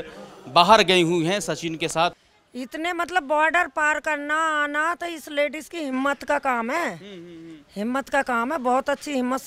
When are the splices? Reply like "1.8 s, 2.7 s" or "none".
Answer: 2.1 s